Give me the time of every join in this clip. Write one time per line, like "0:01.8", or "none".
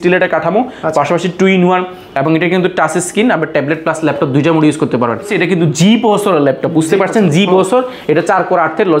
0:05.3